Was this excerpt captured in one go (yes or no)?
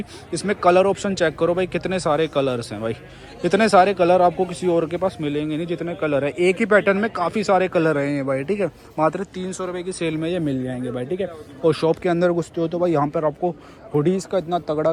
yes